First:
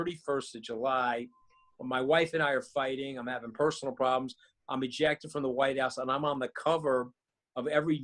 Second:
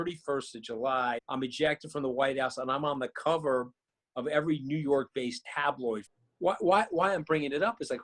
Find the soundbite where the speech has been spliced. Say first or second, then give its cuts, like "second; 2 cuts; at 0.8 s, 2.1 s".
second; 2 cuts; at 1.2 s, 6.1 s